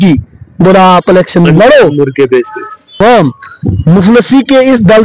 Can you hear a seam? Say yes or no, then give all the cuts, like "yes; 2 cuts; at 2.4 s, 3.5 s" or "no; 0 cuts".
yes; 1 cut; at 3.0 s